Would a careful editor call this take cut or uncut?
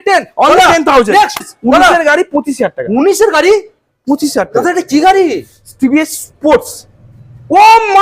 cut